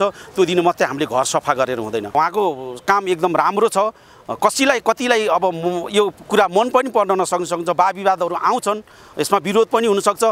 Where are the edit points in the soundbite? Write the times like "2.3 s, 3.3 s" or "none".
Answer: 2.1 s